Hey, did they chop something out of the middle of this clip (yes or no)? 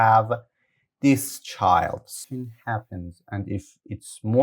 yes